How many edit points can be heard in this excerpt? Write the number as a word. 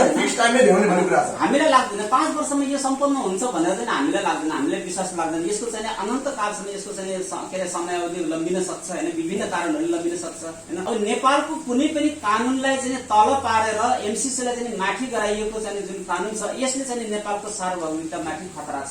one